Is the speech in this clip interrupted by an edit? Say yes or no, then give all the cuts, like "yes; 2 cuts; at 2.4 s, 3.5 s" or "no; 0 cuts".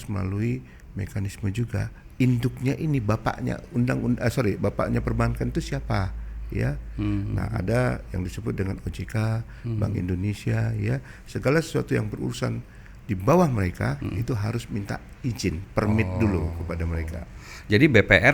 no; 0 cuts